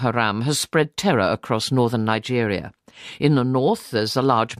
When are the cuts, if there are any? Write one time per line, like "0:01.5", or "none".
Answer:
0:03.5